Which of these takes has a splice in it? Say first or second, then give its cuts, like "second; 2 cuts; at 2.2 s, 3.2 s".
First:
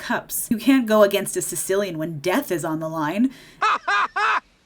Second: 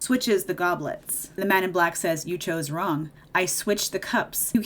second; 2 cuts; at 1.2 s, 3.1 s